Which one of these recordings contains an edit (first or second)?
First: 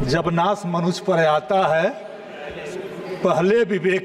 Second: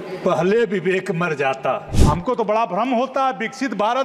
second